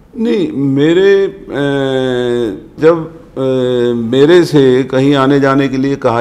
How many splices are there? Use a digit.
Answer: 1